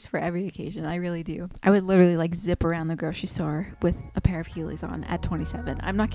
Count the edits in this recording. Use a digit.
0